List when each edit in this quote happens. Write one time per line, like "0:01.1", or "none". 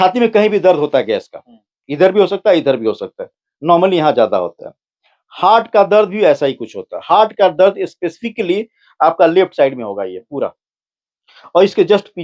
none